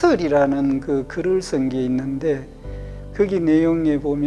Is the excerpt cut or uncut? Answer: uncut